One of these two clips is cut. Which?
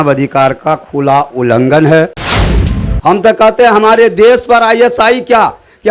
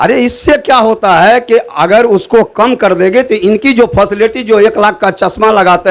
first; 1 cut; at 2.6 s

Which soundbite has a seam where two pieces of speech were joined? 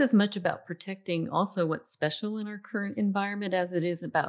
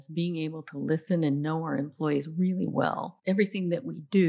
second; 1 cut; at 3.1 s

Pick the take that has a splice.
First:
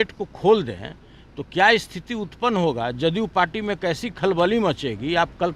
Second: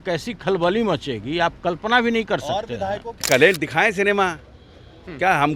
second; 1 cut; at 3.1 s

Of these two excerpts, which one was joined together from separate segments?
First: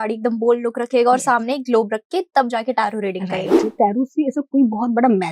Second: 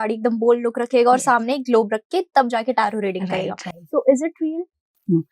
first; 1 cut; at 3.7 s

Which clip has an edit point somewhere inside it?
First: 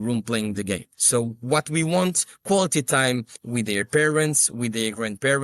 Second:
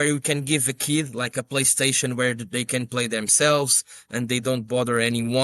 first; 2 cuts; at 0.9 s, 2.3 s

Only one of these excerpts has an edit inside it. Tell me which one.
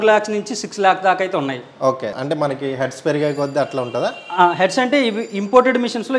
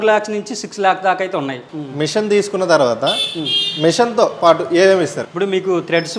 second; 2 cuts; at 1.7 s, 5.2 s

